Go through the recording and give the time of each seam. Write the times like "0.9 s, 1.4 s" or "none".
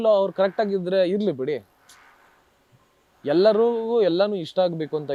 none